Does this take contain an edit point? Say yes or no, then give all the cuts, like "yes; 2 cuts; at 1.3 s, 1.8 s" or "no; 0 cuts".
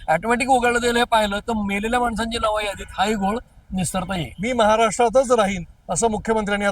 yes; 1 cut; at 4.3 s